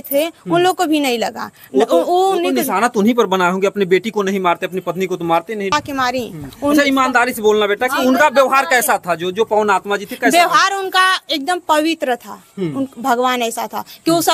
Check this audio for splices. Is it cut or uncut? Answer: cut